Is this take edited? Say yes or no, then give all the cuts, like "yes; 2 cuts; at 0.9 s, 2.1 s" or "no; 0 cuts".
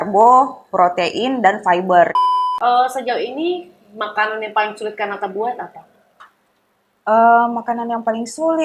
yes; 1 cut; at 2.2 s